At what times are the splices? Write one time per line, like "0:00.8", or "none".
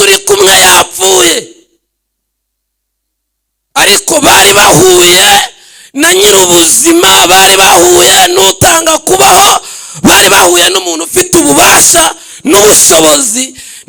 none